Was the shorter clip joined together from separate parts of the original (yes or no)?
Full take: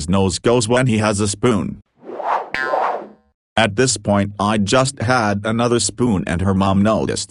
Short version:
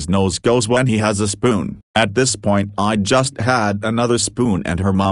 yes